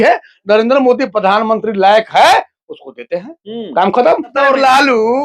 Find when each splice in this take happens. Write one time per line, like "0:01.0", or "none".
0:04.3